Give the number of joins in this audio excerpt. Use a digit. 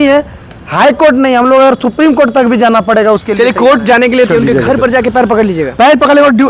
1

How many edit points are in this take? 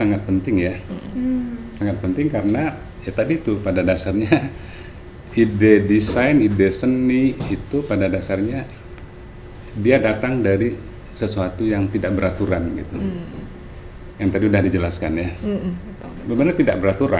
0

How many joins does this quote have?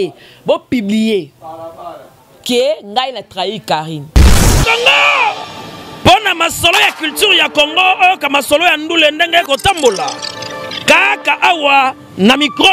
1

